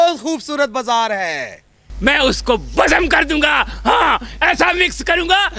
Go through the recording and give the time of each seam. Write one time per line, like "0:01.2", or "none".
0:01.8